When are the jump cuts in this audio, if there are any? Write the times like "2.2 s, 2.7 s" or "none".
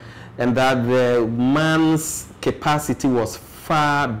none